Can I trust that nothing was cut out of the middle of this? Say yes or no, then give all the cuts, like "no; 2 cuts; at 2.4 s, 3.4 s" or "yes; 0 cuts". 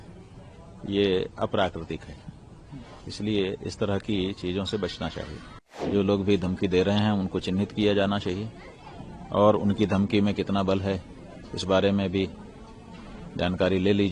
no; 1 cut; at 5.9 s